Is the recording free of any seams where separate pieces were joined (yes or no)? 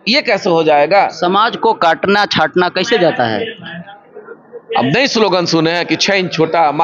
yes